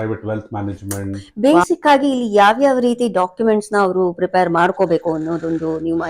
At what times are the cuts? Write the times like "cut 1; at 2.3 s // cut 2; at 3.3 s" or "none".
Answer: cut 1; at 1.2 s